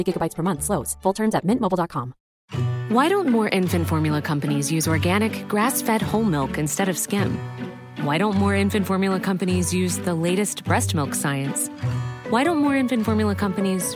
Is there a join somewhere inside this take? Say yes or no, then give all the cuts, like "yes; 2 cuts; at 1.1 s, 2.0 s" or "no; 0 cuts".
yes; 1 cut; at 2.4 s